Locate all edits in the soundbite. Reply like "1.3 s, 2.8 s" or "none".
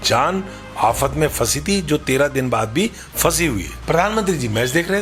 3.7 s